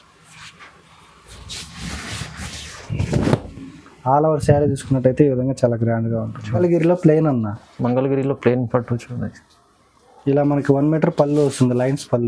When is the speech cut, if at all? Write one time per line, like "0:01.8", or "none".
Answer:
0:06.6